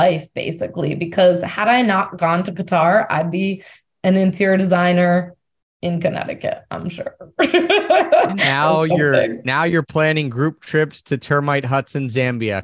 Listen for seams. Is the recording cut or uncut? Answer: uncut